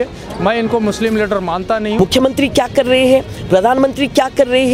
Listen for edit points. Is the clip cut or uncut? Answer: cut